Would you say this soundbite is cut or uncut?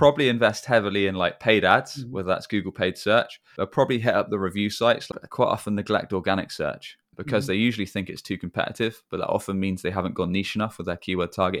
cut